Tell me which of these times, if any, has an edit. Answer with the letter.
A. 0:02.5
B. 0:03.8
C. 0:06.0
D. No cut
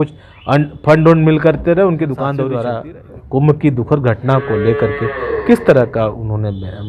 A